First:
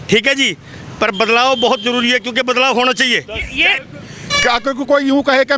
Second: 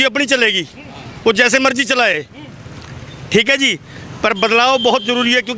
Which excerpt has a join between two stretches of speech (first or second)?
first